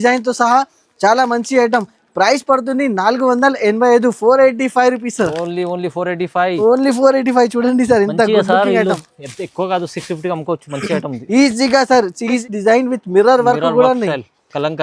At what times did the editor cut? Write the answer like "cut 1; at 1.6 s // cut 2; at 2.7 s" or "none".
cut 1; at 12.4 s